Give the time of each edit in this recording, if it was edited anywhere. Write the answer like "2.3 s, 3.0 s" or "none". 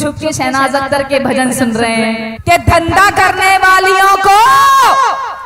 2.3 s